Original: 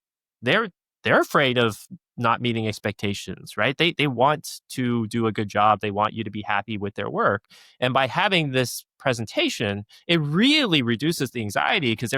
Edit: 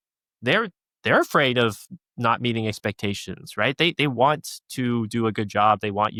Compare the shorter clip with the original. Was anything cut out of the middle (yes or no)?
no